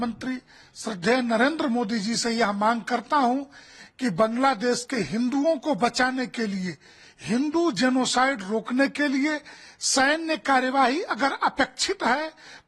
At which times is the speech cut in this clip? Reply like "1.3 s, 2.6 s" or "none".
none

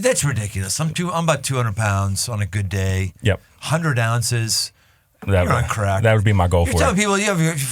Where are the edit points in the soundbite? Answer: 5.2 s

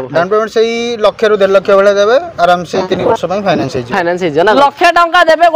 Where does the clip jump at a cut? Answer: 4.6 s

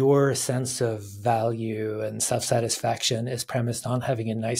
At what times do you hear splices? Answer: none

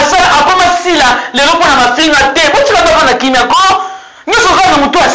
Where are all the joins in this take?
none

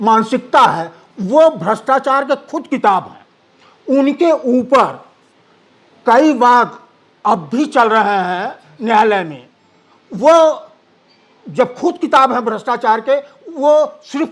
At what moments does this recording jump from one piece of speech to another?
none

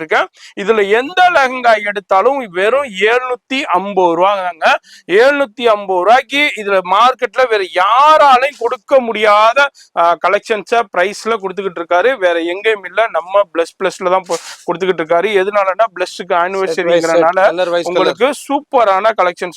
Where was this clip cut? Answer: none

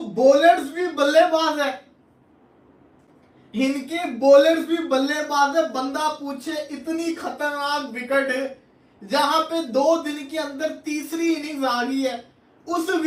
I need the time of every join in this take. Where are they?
none

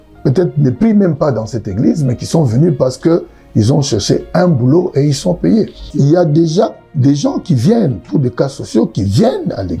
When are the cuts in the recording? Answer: 5.8 s

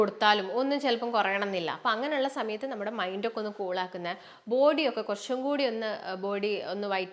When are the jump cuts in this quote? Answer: none

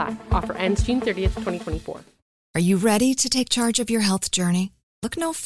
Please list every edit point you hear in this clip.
2.1 s

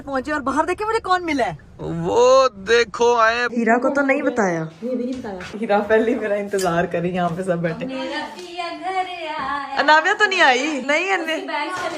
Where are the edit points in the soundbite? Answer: 3.4 s, 5.5 s, 10.8 s

